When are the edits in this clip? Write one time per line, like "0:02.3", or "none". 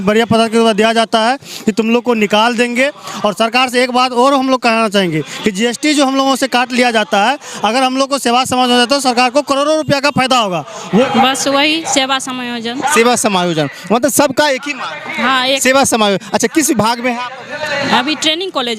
0:11.0